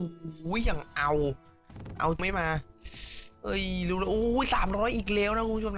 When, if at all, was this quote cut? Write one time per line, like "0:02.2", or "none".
0:02.2